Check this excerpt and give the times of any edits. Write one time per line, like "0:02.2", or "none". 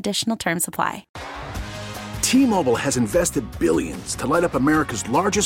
0:01.1